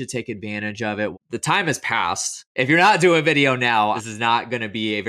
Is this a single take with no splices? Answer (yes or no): no